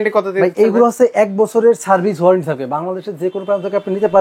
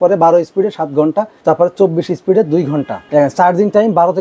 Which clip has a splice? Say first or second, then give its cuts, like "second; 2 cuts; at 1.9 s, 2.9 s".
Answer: second; 2 cuts; at 1.3 s, 3.0 s